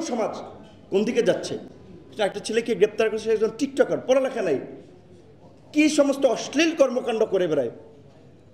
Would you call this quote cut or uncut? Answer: uncut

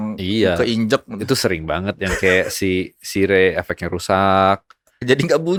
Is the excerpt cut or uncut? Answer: uncut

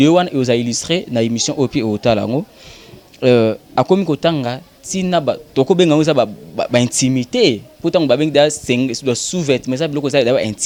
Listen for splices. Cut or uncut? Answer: uncut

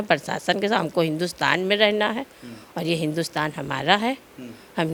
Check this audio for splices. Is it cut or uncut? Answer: uncut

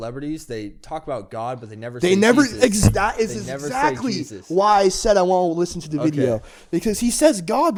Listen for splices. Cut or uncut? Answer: uncut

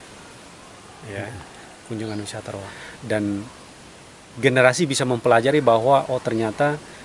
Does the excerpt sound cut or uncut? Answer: cut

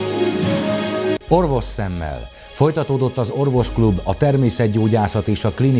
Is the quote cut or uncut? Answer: cut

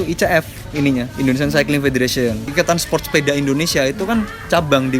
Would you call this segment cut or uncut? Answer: cut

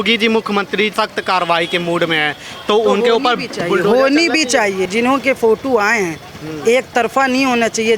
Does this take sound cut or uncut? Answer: cut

